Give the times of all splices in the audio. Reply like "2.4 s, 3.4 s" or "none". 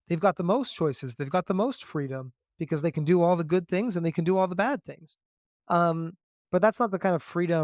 none